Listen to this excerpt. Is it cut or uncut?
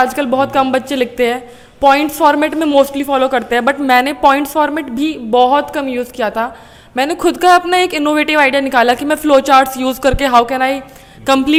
uncut